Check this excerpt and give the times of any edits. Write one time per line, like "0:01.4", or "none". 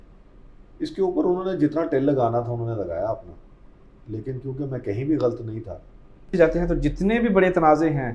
0:06.3